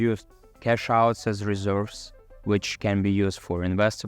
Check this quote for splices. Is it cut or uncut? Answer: uncut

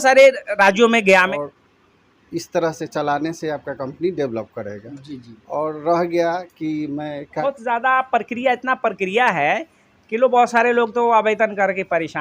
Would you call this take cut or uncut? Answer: cut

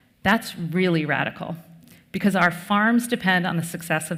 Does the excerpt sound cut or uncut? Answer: uncut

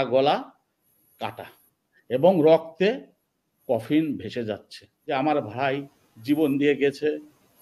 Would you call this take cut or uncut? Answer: cut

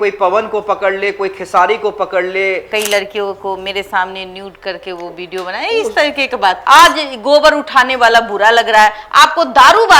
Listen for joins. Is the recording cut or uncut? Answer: cut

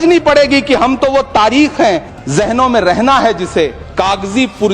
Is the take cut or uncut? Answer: cut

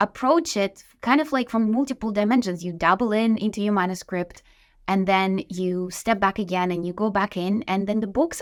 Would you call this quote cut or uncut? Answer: uncut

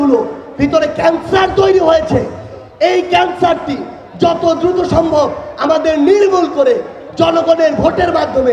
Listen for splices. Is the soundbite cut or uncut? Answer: uncut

